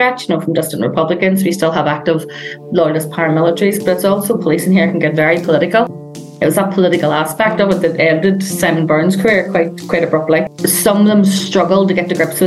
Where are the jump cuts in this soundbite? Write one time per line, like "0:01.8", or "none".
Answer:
0:10.5